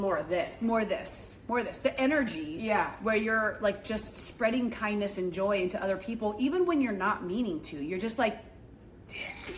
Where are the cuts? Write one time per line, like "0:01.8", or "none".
none